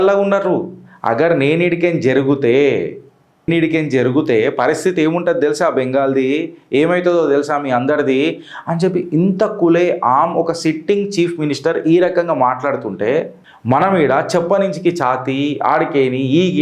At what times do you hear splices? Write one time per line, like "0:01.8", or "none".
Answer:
none